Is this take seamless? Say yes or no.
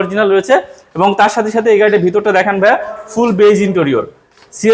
yes